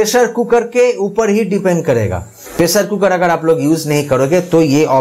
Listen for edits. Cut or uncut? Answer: uncut